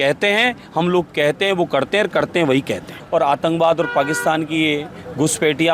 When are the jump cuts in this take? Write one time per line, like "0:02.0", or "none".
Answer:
0:02.9